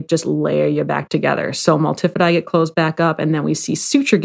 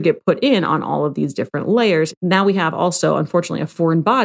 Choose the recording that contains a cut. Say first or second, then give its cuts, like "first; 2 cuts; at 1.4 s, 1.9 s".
second; 1 cut; at 2.1 s